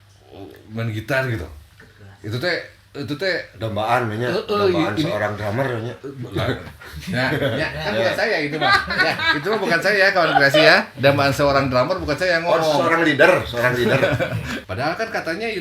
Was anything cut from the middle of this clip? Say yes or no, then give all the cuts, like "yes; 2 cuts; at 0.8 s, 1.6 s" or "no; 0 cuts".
yes; 1 cut; at 14.6 s